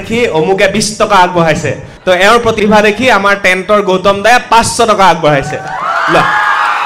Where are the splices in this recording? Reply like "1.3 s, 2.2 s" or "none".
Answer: 1.9 s, 2.6 s